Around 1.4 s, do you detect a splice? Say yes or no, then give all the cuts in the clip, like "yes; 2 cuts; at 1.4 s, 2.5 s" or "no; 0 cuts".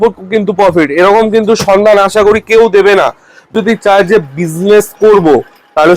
no; 1 cut; at 3.5 s